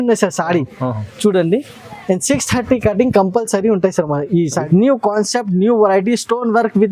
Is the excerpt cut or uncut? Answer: cut